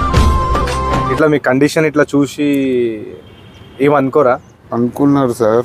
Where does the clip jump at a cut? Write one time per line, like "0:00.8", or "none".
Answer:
0:01.1
0:04.6

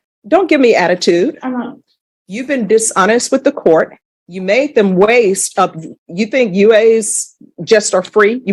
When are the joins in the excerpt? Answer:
none

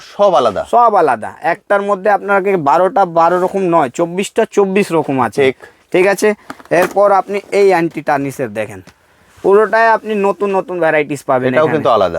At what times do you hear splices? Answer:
none

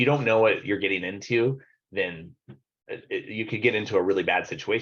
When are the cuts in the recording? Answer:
none

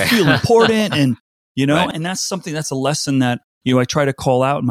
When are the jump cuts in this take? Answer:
0:01.9
0:03.5

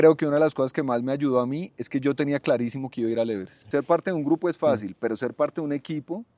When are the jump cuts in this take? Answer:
0:03.6

